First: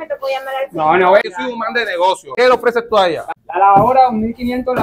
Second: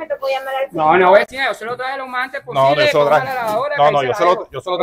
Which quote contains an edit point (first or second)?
first